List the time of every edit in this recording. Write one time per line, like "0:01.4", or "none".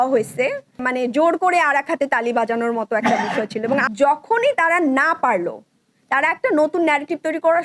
0:00.8
0:03.9